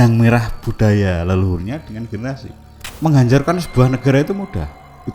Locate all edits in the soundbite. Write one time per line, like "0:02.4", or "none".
0:02.9